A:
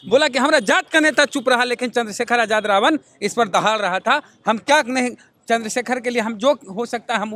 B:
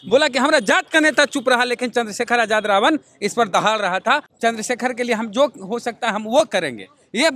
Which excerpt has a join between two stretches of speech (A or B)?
B